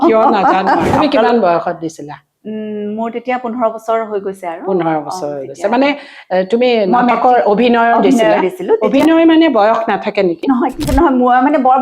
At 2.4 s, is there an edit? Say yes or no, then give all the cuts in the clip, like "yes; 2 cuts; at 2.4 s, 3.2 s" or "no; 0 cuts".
no; 2 cuts; at 0.9 s, 10.8 s